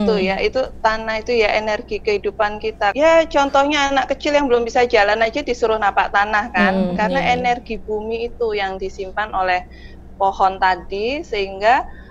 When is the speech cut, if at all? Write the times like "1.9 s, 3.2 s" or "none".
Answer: 2.9 s